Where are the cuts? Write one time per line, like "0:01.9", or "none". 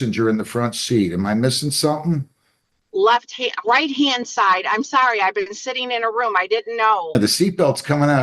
0:07.1